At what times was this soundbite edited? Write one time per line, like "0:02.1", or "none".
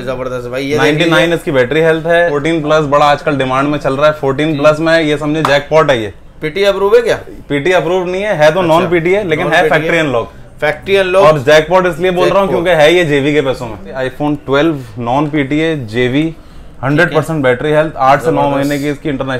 0:02.4
0:14.0